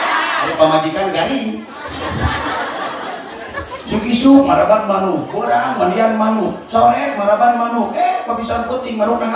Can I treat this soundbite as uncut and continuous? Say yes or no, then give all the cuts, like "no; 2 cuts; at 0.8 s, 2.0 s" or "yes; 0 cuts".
yes; 0 cuts